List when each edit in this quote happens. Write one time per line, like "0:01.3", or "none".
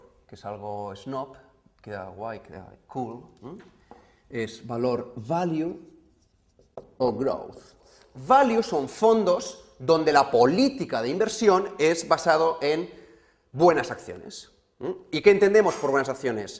0:07.2